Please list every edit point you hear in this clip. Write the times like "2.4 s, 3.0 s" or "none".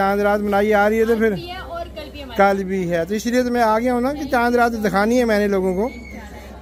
none